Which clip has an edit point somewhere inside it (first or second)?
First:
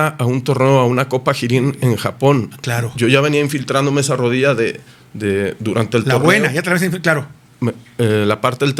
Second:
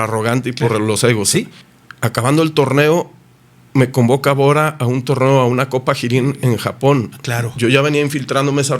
second